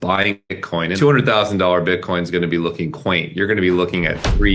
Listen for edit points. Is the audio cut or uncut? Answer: cut